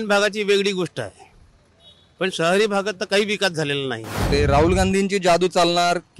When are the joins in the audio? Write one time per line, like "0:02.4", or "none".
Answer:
0:04.3